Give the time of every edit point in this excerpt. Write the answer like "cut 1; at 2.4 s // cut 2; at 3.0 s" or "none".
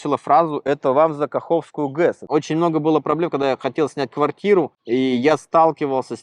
cut 1; at 2.2 s